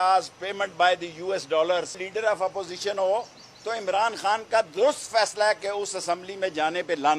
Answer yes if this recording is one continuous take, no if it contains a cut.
no